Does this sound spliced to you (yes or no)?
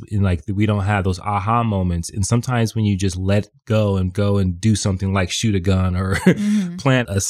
no